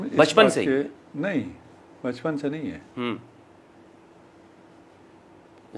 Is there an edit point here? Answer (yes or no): no